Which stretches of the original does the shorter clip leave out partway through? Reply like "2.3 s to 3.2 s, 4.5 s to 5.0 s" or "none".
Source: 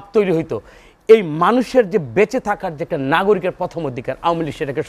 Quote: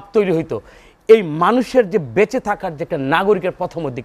none